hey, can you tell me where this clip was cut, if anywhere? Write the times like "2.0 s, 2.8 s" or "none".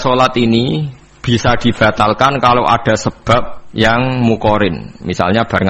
3.6 s